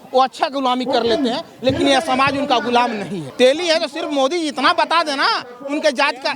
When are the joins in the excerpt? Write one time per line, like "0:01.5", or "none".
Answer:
0:03.2